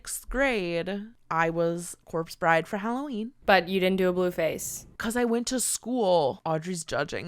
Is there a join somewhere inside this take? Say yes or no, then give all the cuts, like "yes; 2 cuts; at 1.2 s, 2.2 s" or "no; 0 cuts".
yes; 3 cuts; at 1.1 s, 3.3 s, 6.4 s